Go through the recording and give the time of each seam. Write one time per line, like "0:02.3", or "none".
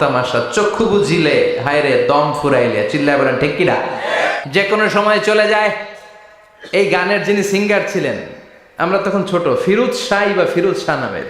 0:04.3